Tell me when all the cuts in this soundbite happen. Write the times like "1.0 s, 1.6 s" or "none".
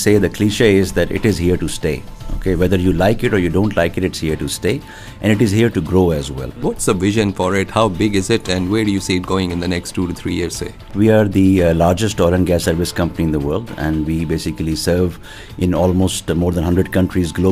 6.5 s, 10.9 s